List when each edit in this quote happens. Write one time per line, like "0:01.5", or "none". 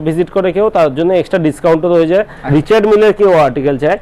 0:02.4